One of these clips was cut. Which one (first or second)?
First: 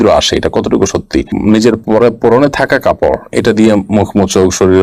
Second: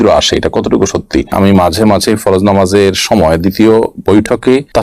second